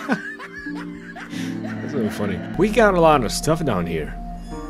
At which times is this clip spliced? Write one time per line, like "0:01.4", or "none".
0:02.5